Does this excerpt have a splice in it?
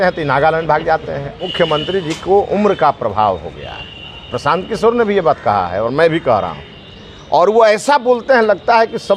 yes; 1 cut; at 1.4 s

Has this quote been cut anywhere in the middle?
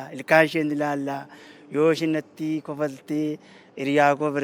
no; 0 cuts

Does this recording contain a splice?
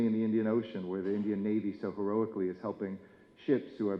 no; 0 cuts

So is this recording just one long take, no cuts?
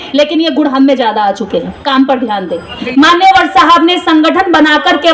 no; 1 cut; at 2.7 s

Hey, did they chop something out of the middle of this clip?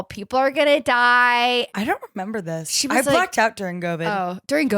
yes; 1 cut; at 1.7 s

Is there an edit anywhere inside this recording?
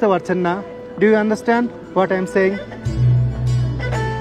no; 0 cuts

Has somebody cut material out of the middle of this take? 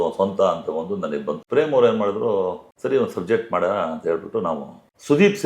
yes; 2 cuts; at 1.4 s, 2.7 s

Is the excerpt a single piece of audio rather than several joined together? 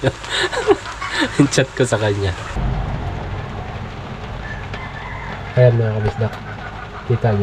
yes; 0 cuts

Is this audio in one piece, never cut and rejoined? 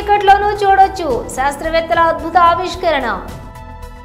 yes; 0 cuts

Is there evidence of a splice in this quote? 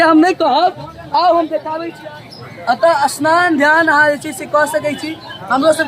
yes; 1 cut; at 1.8 s

